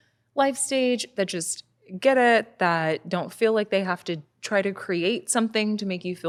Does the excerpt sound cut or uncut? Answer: uncut